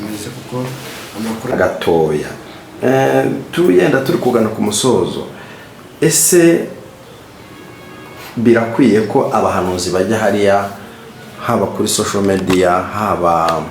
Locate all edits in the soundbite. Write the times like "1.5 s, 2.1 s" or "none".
1.5 s